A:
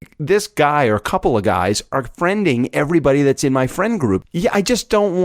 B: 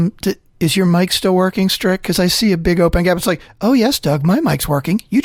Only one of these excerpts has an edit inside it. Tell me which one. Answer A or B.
A